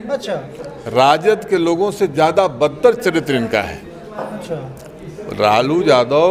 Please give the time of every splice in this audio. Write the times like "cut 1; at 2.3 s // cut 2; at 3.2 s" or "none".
none